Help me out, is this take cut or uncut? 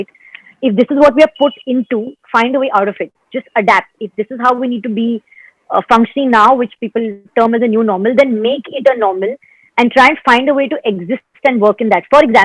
uncut